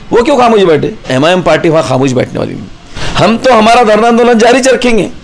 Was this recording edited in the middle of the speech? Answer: yes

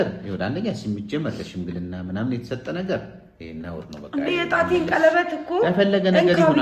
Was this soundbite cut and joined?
no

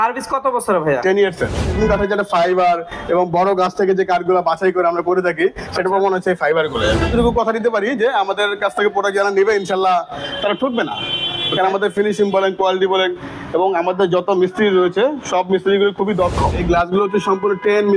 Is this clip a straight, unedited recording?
no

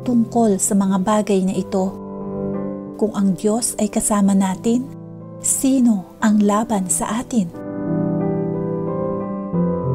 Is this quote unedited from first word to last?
no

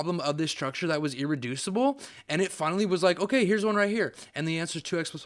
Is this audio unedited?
yes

